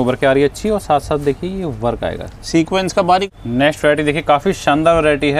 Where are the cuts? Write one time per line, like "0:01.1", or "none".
0:03.3